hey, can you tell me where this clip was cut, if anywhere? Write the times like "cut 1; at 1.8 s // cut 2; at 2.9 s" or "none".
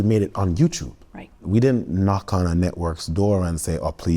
cut 1; at 1.4 s